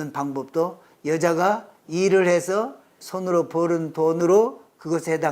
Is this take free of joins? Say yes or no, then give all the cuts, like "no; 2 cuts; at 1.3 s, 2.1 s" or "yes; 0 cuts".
no; 2 cuts; at 3.0 s, 4.2 s